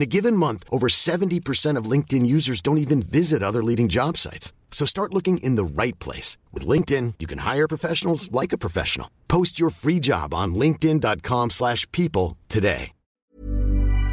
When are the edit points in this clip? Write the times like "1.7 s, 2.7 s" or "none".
13.2 s